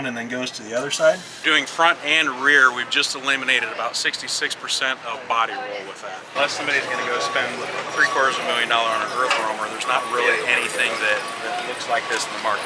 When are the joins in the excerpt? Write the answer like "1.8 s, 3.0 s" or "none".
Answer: 1.4 s, 6.3 s